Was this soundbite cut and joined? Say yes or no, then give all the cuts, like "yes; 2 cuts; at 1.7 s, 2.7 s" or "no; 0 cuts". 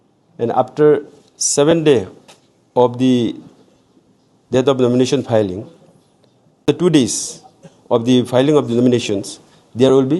yes; 1 cut; at 6.6 s